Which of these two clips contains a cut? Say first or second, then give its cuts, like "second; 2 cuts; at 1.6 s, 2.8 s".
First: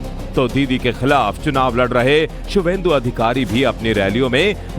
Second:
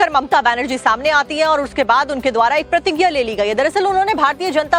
first; 1 cut; at 2.4 s